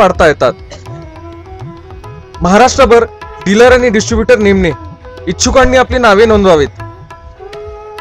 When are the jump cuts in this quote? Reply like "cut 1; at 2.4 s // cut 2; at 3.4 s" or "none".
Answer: cut 1; at 6.7 s